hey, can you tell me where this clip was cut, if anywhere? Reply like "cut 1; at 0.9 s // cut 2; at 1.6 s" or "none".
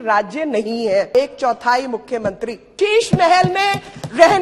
cut 1; at 1.1 s // cut 2; at 2.7 s

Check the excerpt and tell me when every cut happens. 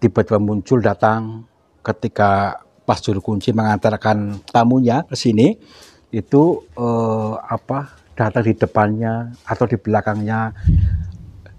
cut 1; at 10.6 s

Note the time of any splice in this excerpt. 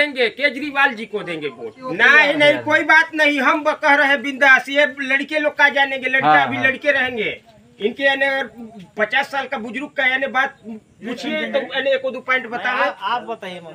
cut 1; at 1.8 s

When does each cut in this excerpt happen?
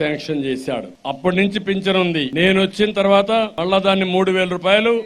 cut 1; at 0.9 s // cut 2; at 2.3 s // cut 3; at 3.5 s

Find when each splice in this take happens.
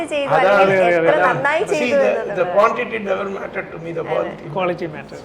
none

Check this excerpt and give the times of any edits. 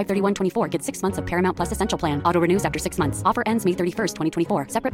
none

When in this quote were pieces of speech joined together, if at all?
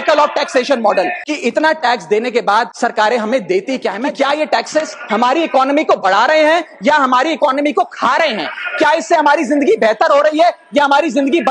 cut 1; at 1.2 s // cut 2; at 2.7 s // cut 3; at 4.0 s

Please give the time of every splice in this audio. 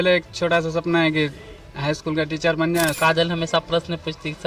cut 1; at 2.9 s

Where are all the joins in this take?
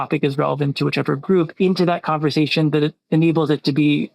cut 1; at 1.5 s

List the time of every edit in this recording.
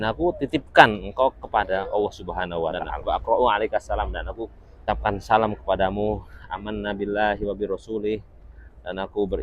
cut 1; at 2.9 s

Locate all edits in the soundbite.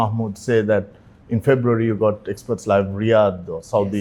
none

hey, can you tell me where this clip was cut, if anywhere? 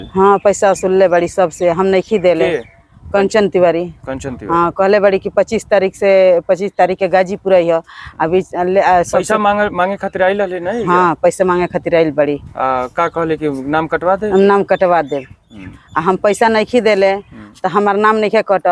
none

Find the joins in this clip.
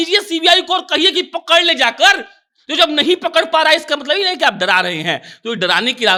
none

